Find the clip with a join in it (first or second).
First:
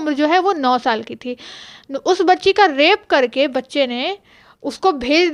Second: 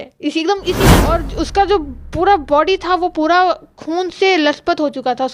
second